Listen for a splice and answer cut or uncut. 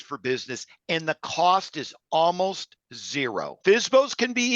cut